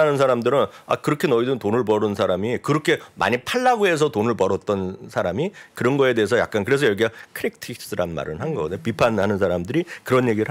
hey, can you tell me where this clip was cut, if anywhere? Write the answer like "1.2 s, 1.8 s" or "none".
none